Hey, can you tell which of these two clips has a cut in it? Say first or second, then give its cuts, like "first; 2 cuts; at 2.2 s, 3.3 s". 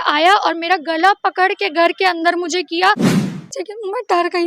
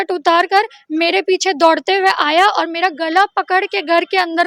first; 1 cut; at 3.3 s